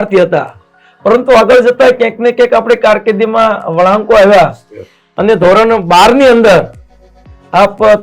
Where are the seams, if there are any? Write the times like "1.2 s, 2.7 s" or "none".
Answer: none